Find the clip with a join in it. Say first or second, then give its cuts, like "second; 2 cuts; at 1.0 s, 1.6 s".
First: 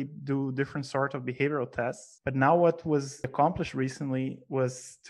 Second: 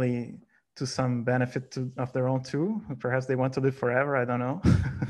first; 2 cuts; at 2.1 s, 3.3 s